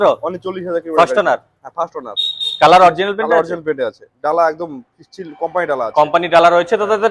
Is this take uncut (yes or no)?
yes